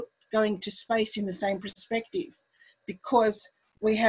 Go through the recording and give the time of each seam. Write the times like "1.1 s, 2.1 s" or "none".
1.7 s